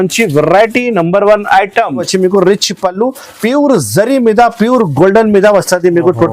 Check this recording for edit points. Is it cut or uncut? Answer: cut